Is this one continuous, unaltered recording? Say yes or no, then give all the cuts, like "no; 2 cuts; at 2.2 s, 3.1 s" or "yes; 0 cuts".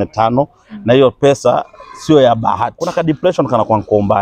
no; 1 cut; at 2.8 s